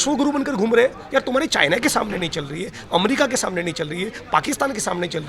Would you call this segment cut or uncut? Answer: uncut